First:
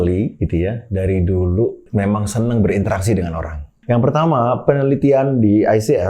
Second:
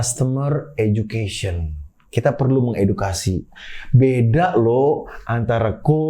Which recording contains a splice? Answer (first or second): first